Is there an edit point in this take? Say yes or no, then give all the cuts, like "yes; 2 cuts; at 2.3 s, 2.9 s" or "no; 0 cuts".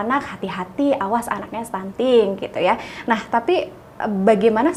no; 0 cuts